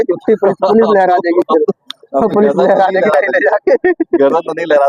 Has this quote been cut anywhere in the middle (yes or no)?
no